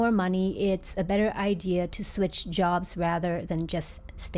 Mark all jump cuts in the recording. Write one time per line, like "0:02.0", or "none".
none